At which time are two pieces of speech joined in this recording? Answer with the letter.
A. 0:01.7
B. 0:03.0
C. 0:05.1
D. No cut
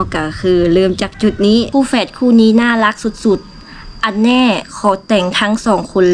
A